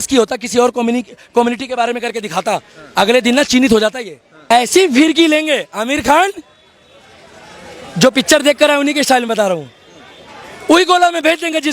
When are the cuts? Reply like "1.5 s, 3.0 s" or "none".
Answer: 4.5 s